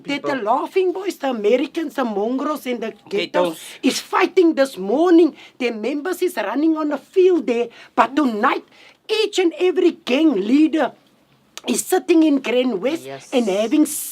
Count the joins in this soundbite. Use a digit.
1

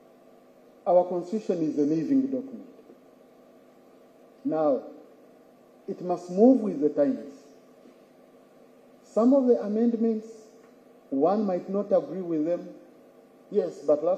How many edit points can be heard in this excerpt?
0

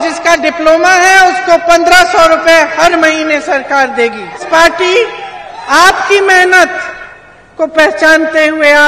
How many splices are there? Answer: 1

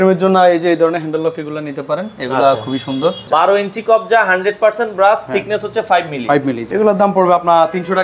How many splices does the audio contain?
2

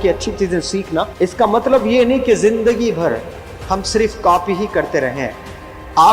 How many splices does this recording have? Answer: 1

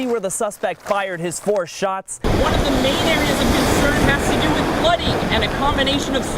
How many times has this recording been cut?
1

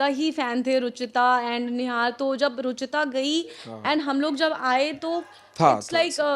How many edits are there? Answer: 0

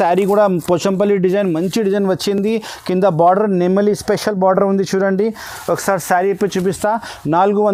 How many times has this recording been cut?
0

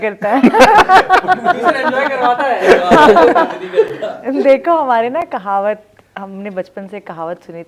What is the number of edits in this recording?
0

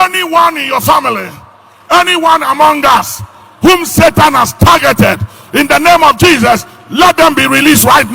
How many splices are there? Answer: 0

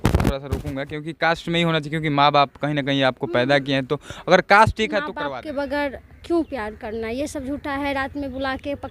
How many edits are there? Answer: 1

